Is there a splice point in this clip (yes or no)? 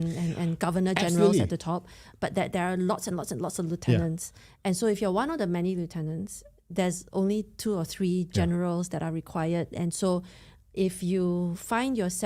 no